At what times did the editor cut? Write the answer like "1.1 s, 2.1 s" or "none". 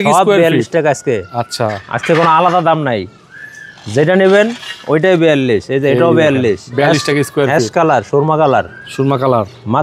none